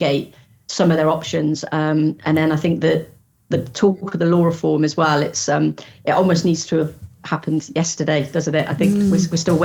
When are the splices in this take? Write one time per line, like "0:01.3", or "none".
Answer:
none